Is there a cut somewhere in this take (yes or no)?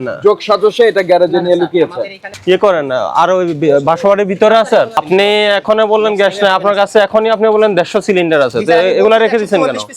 yes